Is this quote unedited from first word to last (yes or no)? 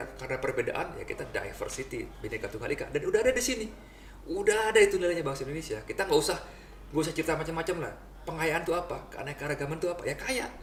yes